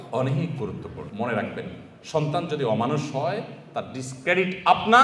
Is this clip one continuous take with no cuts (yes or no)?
no